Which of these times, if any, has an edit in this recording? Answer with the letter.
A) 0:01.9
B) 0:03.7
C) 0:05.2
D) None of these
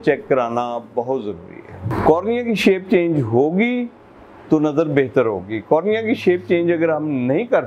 A